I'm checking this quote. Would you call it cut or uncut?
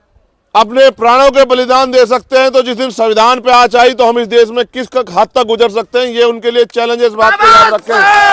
uncut